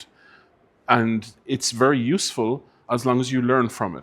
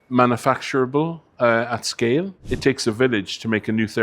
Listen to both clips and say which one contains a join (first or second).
second